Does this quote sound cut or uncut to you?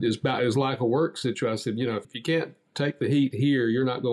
cut